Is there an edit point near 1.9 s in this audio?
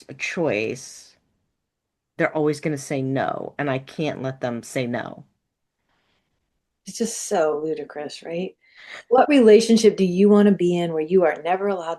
no; 0 cuts

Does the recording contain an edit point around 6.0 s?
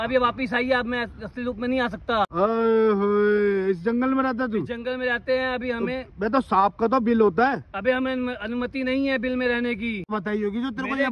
no; 2 cuts; at 2.3 s, 10.1 s

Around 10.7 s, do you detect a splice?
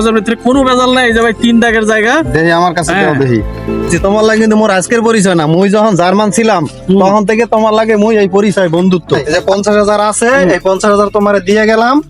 no; 2 cuts; at 3.9 s, 9.2 s

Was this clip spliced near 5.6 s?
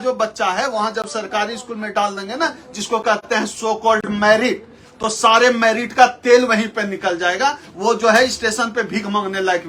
no; 0 cuts

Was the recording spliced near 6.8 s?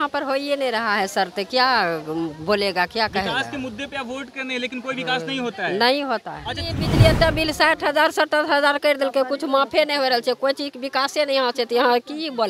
yes; 1 cut; at 6.8 s

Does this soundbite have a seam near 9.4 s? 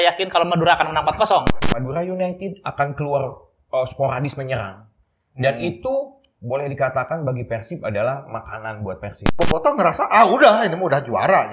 yes; 2 cuts; at 1.6 s, 9.4 s

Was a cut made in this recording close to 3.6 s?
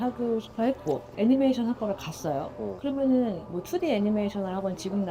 no; 1 cut; at 1.1 s

